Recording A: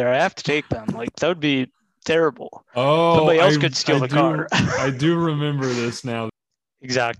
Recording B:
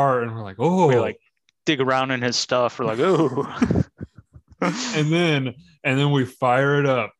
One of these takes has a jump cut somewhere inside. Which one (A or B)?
A